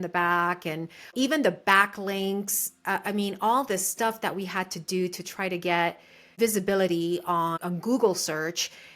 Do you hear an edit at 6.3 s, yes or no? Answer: yes